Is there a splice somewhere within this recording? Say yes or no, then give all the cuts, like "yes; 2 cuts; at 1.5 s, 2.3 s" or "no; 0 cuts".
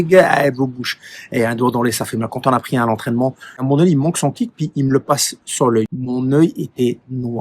yes; 2 cuts; at 3.6 s, 6.0 s